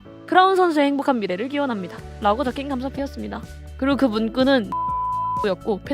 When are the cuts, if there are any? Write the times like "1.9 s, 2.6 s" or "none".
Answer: 4.9 s